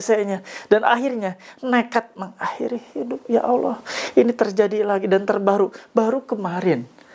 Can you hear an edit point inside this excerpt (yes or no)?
no